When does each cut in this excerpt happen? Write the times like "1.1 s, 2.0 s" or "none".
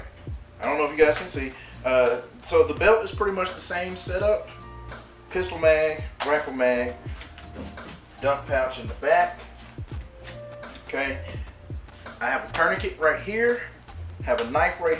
none